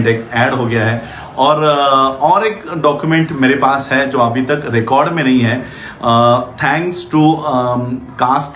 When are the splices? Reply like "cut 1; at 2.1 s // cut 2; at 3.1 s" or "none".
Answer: none